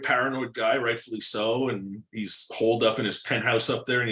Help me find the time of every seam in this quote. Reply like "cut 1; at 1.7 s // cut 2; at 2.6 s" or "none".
none